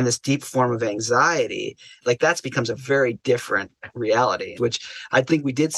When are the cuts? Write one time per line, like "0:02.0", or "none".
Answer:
0:02.0
0:04.5